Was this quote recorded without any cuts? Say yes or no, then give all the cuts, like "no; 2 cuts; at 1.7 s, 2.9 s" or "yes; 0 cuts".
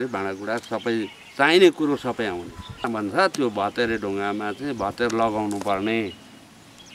no; 1 cut; at 2.9 s